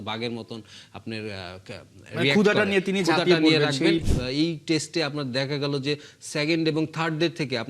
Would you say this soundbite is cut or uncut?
cut